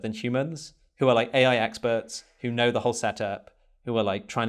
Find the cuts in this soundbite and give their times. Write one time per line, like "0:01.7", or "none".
none